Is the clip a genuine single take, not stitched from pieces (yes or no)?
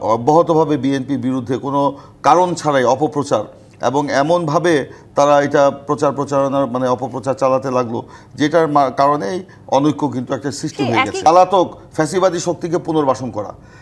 no